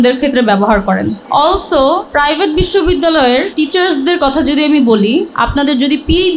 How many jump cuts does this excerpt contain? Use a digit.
4